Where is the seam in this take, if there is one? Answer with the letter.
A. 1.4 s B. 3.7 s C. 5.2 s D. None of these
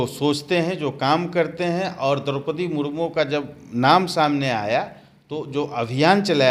D